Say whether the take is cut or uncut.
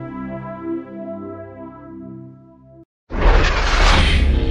cut